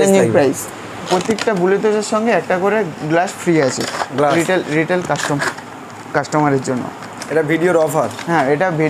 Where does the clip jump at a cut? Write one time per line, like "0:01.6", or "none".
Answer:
0:01.0